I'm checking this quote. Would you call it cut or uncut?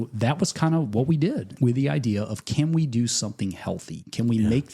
cut